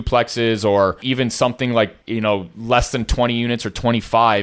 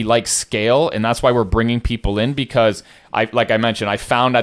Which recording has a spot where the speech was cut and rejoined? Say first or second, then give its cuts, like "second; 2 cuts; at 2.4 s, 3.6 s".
first; 2 cuts; at 1.0 s, 2.0 s